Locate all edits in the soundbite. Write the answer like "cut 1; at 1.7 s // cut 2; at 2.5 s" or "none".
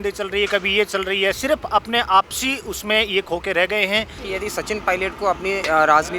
cut 1; at 4.2 s